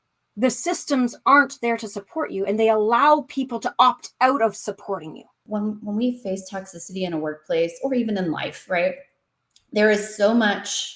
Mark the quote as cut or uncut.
cut